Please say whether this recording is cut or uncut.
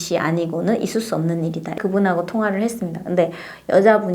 cut